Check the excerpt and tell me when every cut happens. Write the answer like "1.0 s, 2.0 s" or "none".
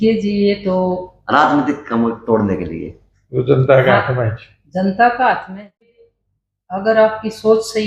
5.8 s